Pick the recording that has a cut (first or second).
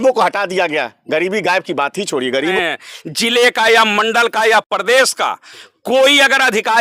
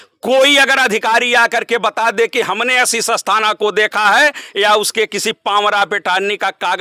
first